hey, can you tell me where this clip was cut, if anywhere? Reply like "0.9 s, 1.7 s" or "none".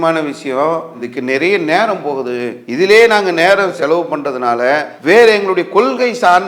4.9 s